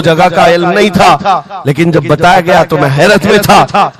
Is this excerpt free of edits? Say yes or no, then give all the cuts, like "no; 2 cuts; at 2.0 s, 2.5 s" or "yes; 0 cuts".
yes; 0 cuts